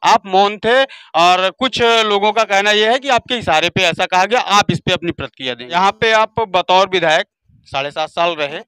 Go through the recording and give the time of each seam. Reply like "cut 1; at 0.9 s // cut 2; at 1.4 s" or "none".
cut 1; at 5.6 s

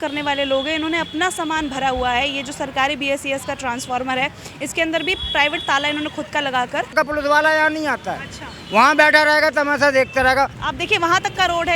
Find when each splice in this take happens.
cut 1; at 6.9 s // cut 2; at 10.6 s

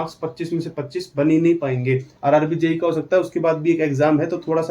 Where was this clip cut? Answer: cut 1; at 2.1 s

